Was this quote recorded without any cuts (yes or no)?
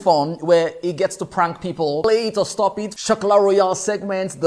no